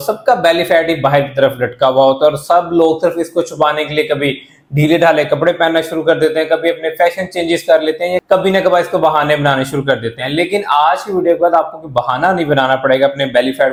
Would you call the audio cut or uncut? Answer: uncut